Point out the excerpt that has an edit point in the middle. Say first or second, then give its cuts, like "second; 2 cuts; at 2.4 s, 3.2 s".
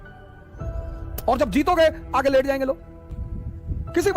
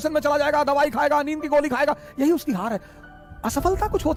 first; 1 cut; at 3.0 s